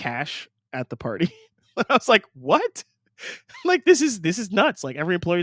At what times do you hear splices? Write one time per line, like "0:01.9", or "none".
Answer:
none